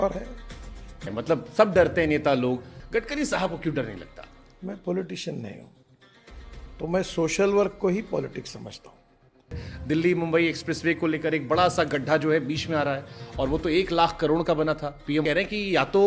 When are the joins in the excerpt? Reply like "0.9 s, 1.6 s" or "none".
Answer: 1.1 s, 2.7 s, 9.6 s, 15.2 s